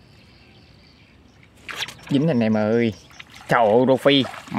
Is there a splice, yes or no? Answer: no